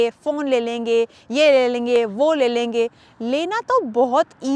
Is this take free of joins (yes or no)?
yes